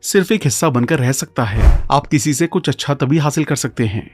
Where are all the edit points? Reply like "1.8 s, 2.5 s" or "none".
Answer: 1.9 s